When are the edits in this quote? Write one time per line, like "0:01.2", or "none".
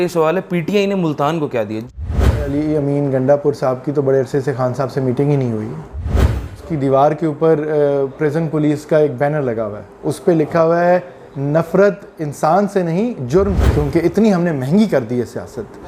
0:02.0
0:06.1
0:13.7